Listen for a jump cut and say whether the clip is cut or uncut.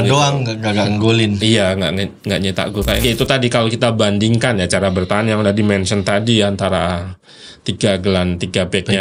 cut